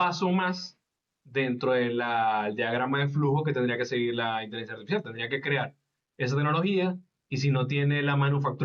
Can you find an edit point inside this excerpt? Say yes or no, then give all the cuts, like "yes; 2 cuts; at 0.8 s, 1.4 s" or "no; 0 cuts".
no; 0 cuts